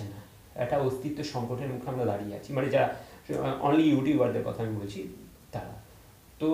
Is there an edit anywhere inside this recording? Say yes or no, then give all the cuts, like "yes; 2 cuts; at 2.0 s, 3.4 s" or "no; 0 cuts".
no; 0 cuts